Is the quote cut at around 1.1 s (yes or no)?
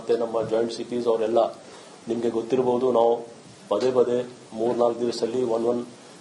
yes